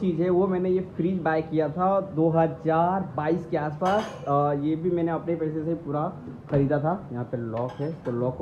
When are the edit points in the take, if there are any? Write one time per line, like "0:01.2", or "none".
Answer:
none

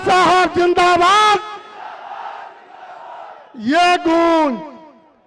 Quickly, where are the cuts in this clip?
none

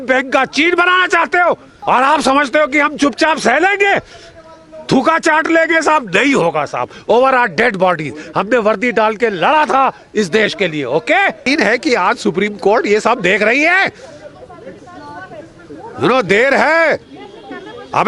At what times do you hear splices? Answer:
0:11.4

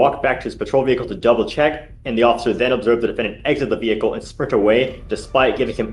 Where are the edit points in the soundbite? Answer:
none

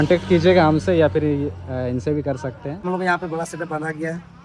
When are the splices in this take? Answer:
0:02.8

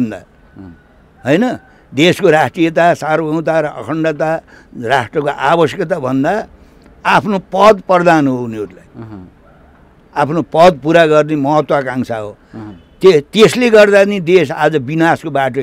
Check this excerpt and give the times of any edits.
none

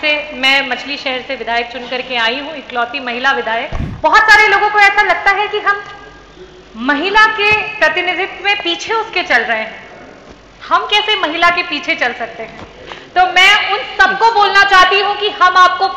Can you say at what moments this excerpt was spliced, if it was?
0:03.8

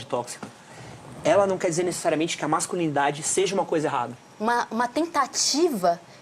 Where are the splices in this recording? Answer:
0:04.2

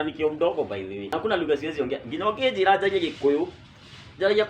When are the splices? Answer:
0:01.1

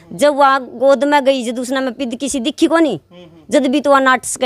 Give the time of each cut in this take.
none

